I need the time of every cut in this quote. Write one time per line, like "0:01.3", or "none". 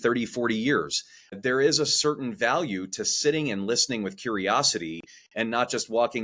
0:01.4